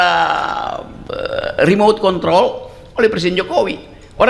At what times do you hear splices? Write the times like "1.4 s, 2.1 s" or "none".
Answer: none